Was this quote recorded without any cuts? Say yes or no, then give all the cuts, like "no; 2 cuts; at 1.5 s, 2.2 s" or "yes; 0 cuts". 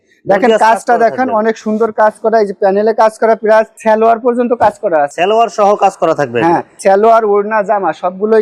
yes; 0 cuts